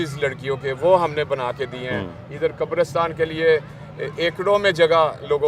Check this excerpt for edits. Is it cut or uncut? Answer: uncut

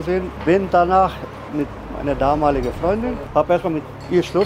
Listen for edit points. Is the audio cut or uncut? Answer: cut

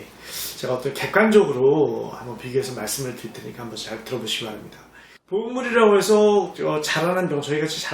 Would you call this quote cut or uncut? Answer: cut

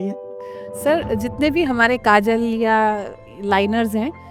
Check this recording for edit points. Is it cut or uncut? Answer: uncut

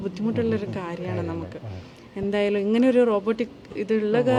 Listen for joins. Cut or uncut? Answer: uncut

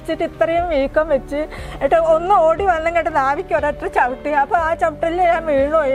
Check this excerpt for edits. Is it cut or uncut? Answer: uncut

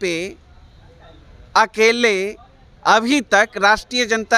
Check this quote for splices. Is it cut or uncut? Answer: uncut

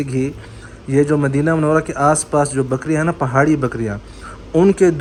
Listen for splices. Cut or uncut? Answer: uncut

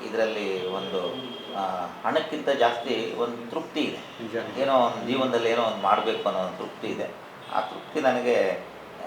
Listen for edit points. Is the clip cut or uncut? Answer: uncut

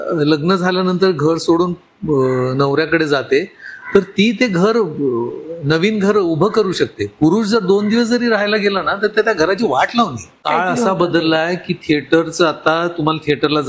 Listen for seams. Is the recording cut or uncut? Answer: cut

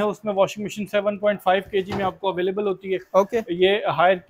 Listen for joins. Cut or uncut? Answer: uncut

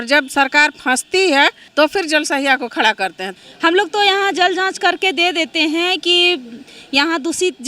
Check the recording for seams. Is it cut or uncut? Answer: cut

